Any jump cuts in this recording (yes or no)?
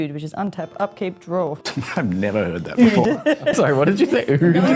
yes